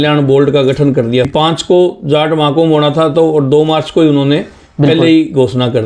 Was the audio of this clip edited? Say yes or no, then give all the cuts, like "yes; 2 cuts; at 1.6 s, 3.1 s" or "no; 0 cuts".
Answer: yes; 1 cut; at 1.3 s